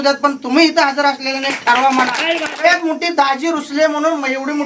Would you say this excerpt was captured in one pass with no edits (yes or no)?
no